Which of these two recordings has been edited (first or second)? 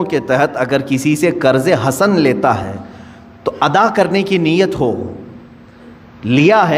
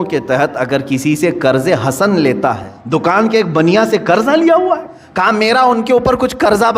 second